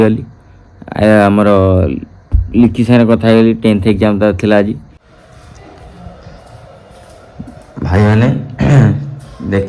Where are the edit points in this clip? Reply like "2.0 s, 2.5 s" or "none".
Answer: 5.5 s